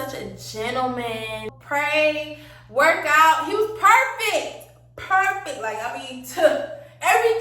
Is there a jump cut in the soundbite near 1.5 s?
yes; 1 cut; at 1.5 s

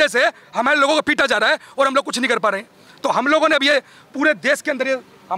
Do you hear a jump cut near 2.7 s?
no; 0 cuts

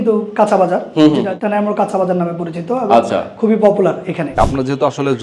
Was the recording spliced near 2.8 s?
no; 2 cuts; at 1.3 s, 4.4 s

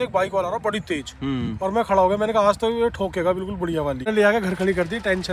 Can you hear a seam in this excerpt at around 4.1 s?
yes; 1 cut; at 4.1 s

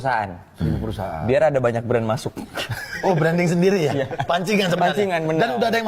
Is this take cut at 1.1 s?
no; 0 cuts

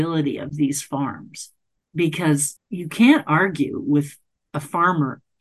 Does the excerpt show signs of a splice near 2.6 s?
yes; 1 cut; at 2.6 s

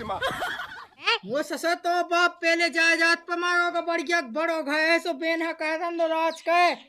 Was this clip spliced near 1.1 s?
yes; 1 cut; at 1.1 s

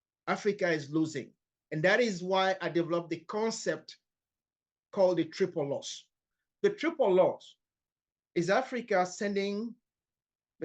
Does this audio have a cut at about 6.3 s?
yes; 1 cut; at 6.3 s

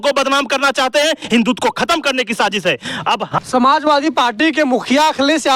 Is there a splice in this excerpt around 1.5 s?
no; 1 cut; at 3.4 s

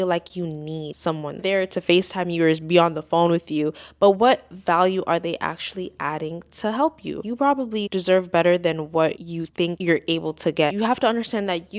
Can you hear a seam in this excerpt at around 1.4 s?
yes; 3 cuts; at 1.4 s, 7.2 s, 10.7 s

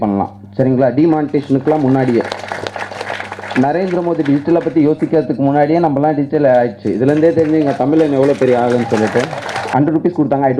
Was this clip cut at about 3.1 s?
yes; 2 cuts; at 3.1 s, 9.6 s

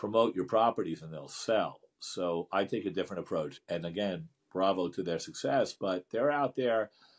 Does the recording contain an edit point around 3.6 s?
yes; 1 cut; at 3.6 s

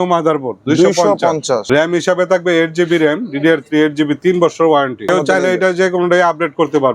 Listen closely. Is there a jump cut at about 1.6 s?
yes; 2 cuts; at 1.6 s, 5.0 s

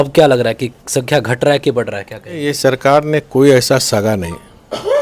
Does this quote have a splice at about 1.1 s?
no; 1 cut; at 2.4 s

